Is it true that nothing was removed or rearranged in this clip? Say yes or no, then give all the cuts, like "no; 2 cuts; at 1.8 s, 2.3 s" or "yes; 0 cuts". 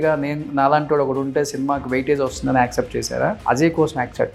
no; 1 cut; at 3.4 s